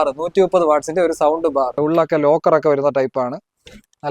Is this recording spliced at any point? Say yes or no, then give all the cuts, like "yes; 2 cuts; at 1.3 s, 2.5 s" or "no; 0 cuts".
yes; 1 cut; at 1.8 s